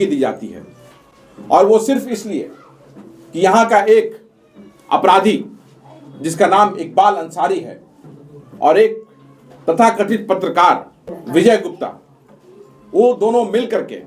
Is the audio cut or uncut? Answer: uncut